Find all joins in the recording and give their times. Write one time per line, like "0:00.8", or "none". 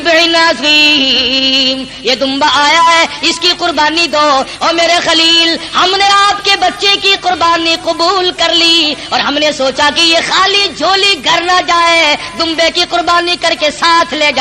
none